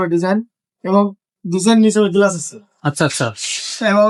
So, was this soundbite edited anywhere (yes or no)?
no